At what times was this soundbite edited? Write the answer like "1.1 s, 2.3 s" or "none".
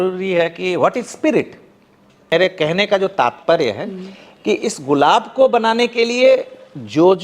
2.2 s